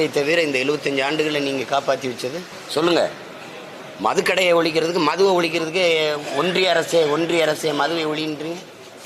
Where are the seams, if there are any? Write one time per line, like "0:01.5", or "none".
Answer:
0:02.5